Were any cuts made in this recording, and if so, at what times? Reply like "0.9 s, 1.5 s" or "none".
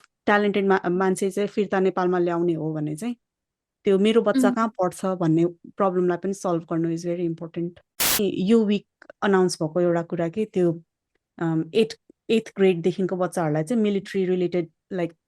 8.0 s